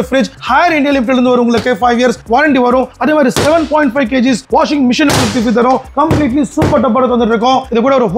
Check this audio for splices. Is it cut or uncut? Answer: uncut